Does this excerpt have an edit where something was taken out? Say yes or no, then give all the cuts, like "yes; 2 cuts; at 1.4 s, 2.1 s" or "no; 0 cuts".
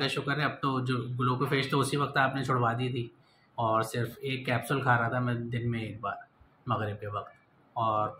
no; 0 cuts